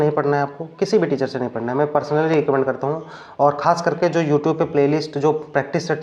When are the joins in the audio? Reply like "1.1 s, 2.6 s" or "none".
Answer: none